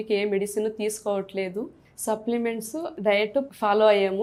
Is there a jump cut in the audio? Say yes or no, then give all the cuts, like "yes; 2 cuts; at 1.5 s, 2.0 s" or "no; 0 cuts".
no; 0 cuts